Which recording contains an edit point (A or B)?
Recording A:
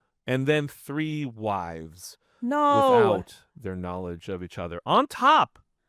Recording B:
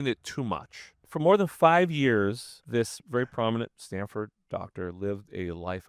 B